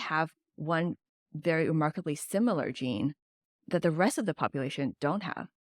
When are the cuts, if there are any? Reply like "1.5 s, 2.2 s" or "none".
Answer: 3.4 s